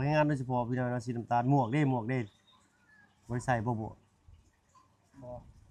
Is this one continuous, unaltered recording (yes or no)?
yes